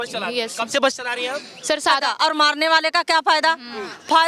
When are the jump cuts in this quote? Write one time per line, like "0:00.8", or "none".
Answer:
0:02.1